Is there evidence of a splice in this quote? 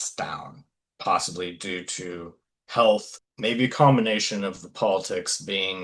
yes; 1 cut; at 3.2 s

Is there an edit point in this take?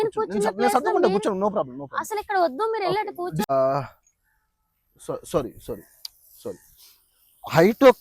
yes; 1 cut; at 3.5 s

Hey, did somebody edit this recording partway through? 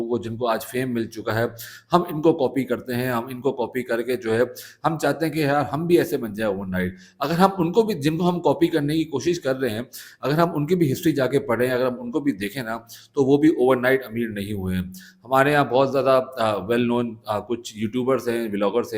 no; 0 cuts

